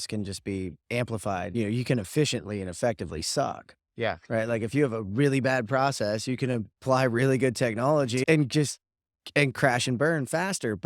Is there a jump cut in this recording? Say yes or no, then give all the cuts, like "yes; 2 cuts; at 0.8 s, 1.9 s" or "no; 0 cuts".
yes; 2 cuts; at 1.5 s, 8.2 s